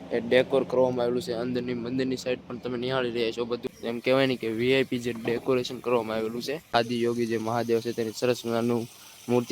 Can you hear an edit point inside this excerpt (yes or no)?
yes